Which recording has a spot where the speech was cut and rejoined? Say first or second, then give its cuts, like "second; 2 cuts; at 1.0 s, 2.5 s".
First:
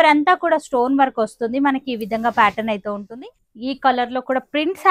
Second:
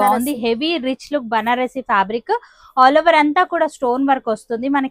first; 1 cut; at 3.0 s